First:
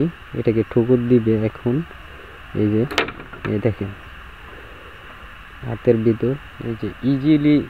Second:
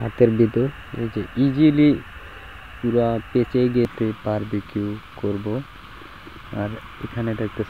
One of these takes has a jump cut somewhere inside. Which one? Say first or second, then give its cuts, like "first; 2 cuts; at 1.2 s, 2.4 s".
second; 1 cut; at 3.9 s